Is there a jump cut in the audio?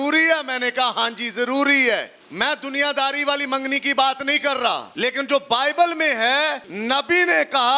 yes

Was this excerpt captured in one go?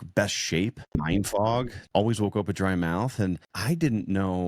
no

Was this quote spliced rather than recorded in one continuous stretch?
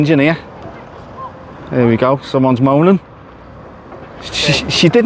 no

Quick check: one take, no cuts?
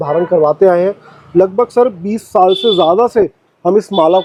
yes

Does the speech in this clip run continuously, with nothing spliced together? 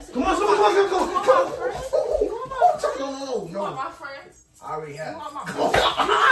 yes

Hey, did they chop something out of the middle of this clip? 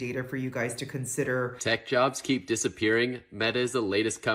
yes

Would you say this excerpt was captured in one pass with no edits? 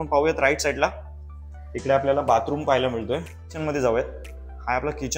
no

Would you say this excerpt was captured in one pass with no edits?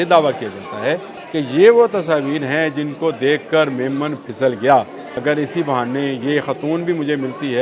no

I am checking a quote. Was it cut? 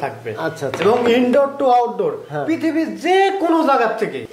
no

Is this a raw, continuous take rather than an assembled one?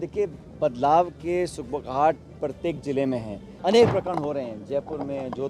no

